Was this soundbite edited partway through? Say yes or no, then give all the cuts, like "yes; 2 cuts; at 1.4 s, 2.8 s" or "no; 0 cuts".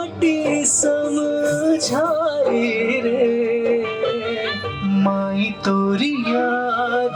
no; 0 cuts